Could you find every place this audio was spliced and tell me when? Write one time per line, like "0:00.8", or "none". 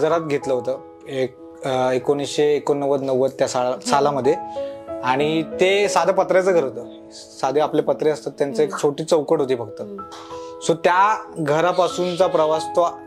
none